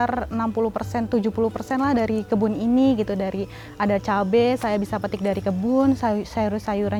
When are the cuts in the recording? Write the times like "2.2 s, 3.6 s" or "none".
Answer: none

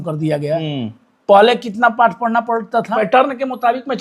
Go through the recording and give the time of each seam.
2.9 s

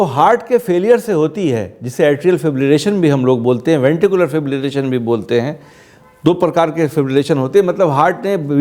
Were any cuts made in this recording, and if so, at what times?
none

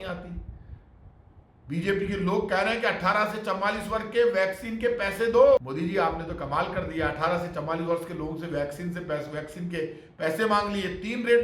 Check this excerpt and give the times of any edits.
5.6 s

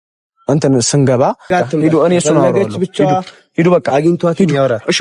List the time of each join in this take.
1.5 s

